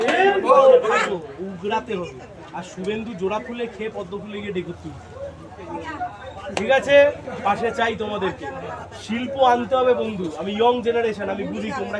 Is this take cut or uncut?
uncut